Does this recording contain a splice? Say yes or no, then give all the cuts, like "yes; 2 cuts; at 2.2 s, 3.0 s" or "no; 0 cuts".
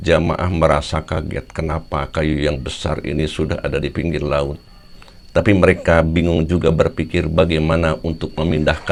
no; 0 cuts